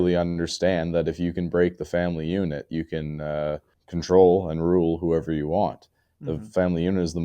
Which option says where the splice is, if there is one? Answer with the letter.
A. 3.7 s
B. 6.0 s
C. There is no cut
A